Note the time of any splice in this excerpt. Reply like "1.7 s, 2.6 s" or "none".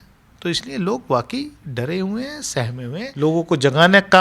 3.1 s